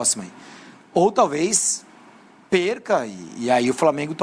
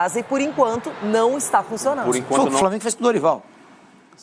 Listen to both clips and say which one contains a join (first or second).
second